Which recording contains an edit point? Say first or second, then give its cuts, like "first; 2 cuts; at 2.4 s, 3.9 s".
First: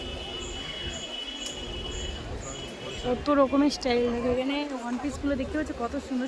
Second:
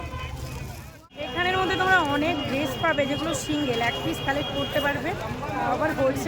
second; 1 cut; at 1.0 s